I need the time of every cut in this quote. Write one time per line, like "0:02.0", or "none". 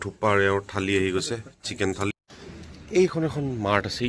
0:02.1

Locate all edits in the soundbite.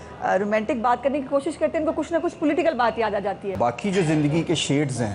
0:03.5

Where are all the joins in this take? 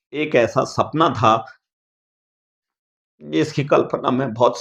none

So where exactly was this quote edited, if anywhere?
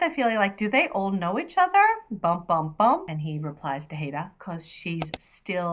0:03.1

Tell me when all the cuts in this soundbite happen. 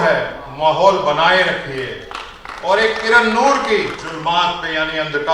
0:04.0

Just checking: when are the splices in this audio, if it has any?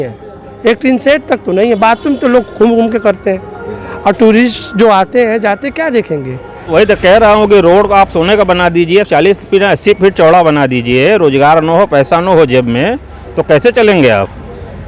0:06.7

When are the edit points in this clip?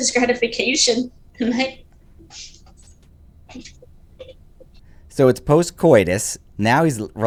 none

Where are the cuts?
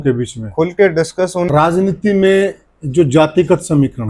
0:01.5

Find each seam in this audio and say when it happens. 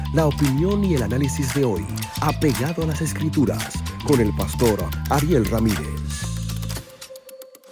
none

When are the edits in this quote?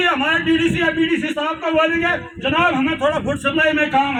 none

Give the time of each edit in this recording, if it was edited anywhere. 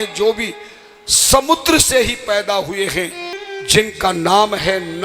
0:03.4

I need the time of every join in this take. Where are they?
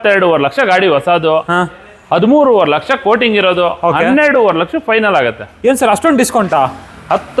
none

